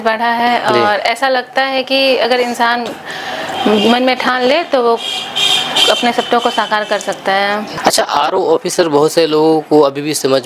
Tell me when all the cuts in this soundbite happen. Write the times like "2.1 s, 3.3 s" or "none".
7.7 s